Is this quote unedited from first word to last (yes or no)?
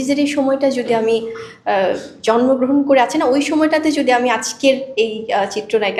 yes